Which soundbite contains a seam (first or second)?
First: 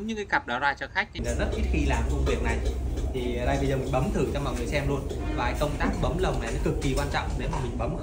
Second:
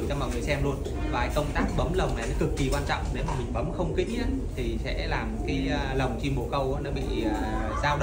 first